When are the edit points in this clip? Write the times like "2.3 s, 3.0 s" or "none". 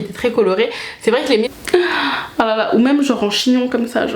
1.5 s